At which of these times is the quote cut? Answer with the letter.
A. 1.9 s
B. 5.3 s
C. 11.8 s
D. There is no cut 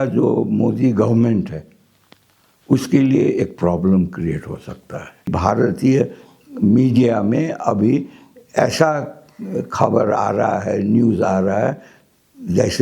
B